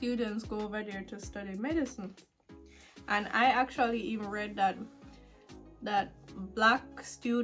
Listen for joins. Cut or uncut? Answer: uncut